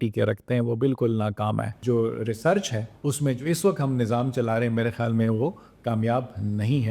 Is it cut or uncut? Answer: cut